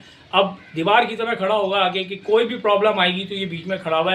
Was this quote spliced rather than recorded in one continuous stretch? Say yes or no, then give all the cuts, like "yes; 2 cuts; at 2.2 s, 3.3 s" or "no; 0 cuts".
no; 0 cuts